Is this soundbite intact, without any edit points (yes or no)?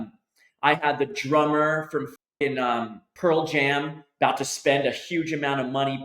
no